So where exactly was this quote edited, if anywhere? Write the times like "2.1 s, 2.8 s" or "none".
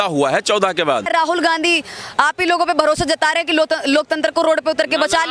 1.1 s